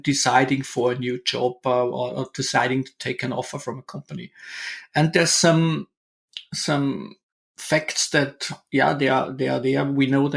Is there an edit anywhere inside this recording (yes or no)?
no